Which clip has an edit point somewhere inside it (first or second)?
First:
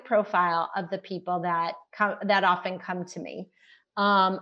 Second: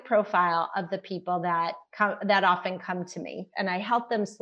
second